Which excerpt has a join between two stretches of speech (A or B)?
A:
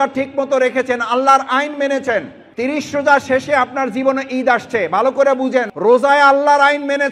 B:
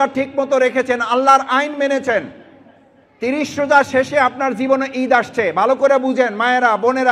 A